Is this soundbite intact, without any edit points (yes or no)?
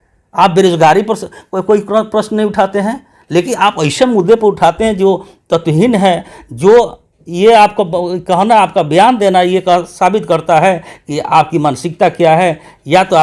yes